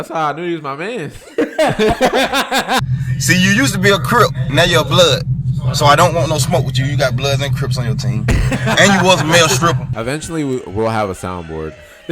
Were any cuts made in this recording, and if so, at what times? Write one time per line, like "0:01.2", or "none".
0:02.8
0:09.9